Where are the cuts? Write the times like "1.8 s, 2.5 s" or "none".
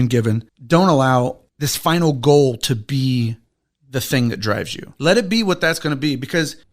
4.9 s